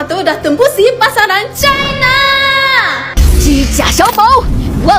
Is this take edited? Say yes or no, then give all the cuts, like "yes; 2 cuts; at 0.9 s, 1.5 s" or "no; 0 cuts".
no; 0 cuts